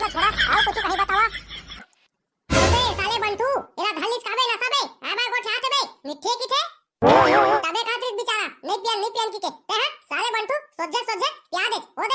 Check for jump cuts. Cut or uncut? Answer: cut